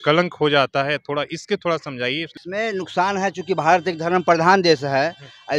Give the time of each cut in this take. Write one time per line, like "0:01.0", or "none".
0:02.3

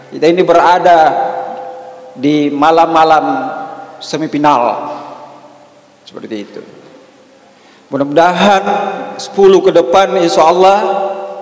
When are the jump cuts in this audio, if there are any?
none

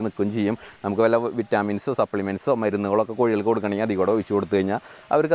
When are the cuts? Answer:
none

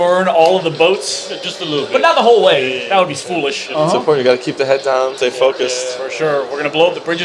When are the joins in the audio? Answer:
0:03.6
0:05.1

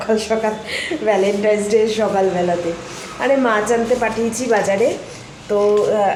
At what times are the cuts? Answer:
none

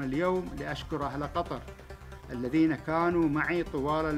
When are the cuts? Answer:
none

